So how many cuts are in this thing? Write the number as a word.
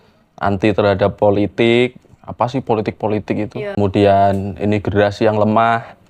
one